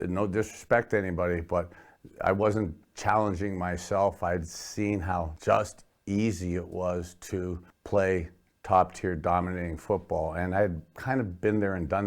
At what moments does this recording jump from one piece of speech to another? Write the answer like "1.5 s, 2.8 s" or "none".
5.3 s, 7.7 s